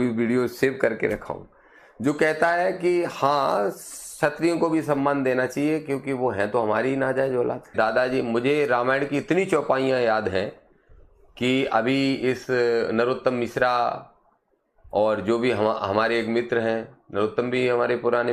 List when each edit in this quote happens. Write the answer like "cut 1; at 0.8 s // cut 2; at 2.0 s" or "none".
cut 1; at 7.7 s